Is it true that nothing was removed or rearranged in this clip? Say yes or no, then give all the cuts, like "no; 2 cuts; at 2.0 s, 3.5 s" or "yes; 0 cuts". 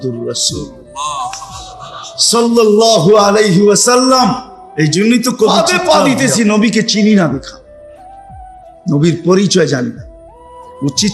no; 1 cut; at 5.5 s